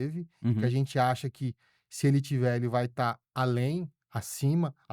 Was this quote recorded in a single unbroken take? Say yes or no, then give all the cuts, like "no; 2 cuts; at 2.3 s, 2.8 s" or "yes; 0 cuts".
no; 1 cut; at 3.2 s